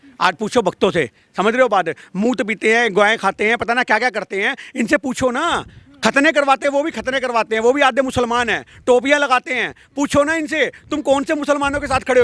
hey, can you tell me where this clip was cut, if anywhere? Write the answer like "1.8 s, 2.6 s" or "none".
none